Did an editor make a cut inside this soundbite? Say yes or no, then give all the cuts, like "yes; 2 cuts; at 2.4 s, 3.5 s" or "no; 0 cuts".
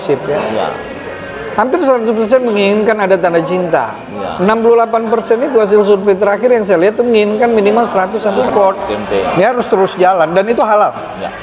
yes; 1 cut; at 8.3 s